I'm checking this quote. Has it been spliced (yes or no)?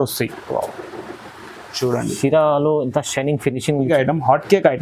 yes